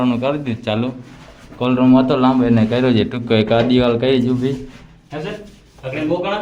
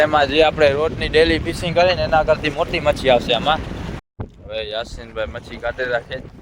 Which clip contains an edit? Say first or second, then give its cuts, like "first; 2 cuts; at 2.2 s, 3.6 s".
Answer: second; 1 cut; at 4.0 s